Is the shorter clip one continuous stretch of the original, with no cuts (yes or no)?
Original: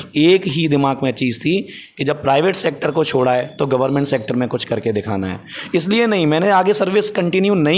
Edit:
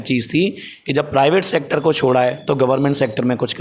yes